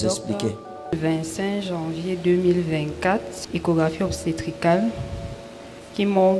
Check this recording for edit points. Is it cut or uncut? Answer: cut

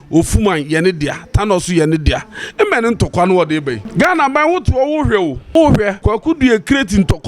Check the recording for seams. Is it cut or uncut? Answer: cut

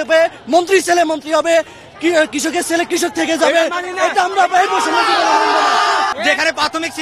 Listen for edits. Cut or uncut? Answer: cut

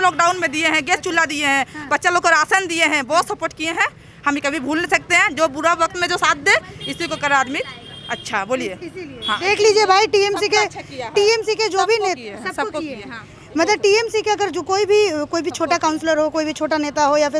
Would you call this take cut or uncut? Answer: uncut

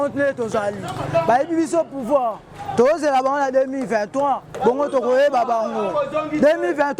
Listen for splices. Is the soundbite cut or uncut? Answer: uncut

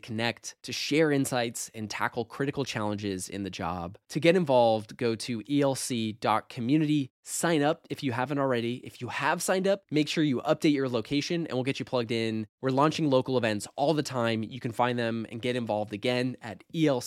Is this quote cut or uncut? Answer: uncut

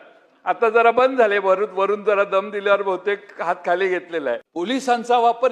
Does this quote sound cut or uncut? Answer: cut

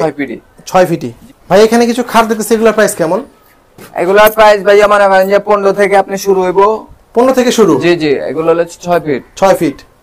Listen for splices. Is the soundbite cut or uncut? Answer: uncut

